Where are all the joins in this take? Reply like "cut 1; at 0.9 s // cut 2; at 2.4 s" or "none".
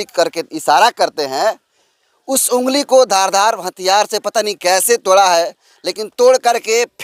none